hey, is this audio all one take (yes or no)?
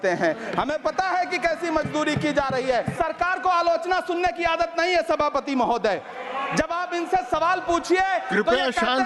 no